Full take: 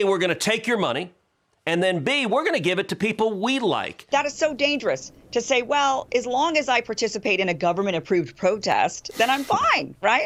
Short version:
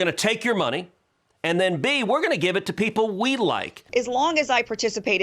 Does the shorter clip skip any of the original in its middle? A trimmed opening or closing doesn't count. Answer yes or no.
yes